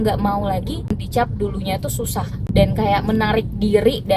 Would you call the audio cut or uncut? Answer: cut